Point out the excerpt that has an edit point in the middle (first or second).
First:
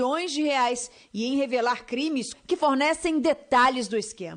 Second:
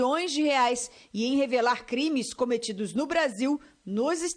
second